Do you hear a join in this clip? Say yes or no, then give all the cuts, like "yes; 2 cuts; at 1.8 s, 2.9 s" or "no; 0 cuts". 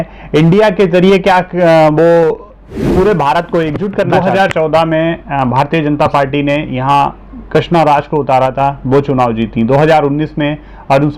yes; 1 cut; at 4.1 s